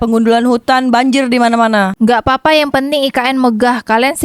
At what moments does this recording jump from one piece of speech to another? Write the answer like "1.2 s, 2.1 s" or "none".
none